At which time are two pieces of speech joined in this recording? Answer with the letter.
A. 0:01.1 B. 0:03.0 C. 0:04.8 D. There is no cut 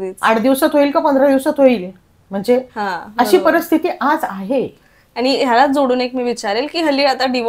D